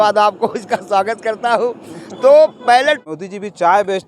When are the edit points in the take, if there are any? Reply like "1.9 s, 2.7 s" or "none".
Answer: 3.0 s